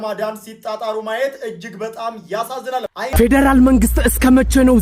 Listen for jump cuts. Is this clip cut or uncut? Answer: cut